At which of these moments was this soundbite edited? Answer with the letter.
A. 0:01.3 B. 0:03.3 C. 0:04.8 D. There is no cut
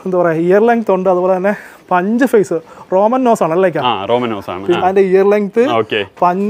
C